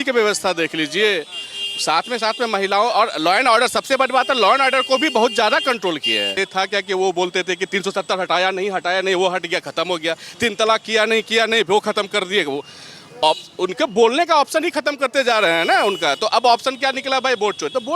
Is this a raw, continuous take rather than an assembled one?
no; 1 cut; at 6.4 s

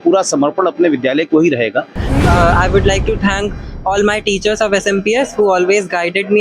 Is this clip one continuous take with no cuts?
no; 1 cut; at 2.2 s

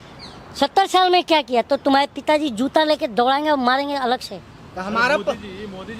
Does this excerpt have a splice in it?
no; 0 cuts

